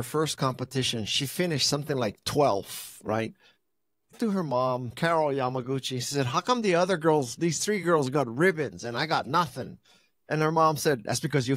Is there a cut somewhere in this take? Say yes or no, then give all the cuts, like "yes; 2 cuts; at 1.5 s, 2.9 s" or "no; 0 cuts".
yes; 1 cut; at 4.1 s